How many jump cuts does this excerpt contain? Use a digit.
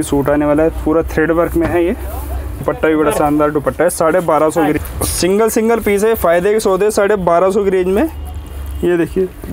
2